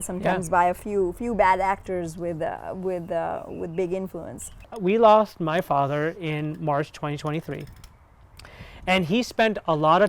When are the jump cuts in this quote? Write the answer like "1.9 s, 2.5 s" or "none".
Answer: 4.6 s